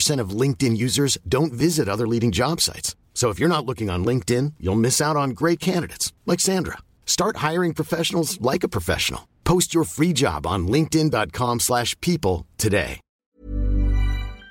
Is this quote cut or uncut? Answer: cut